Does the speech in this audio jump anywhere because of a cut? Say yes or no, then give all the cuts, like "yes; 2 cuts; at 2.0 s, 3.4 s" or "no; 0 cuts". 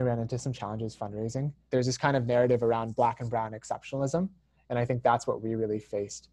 yes; 1 cut; at 1.6 s